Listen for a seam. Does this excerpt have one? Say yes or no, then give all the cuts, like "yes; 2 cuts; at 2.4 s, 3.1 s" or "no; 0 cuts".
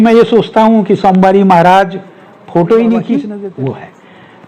yes; 1 cut; at 3.3 s